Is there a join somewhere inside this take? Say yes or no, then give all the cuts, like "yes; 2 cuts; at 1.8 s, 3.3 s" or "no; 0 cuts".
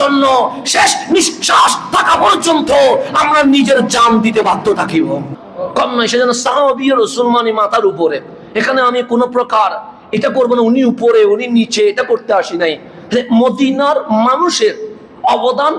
yes; 1 cut; at 5.4 s